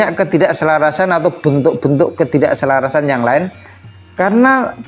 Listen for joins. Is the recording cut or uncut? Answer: uncut